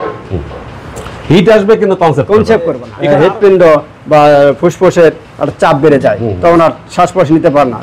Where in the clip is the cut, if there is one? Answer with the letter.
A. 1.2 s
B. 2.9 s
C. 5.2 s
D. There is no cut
B